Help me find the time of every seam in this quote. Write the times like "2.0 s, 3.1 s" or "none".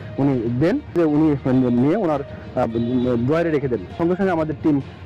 1.0 s, 3.9 s